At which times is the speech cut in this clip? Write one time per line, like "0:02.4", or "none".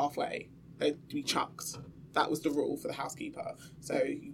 none